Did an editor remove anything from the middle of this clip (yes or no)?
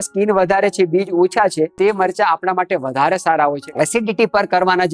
yes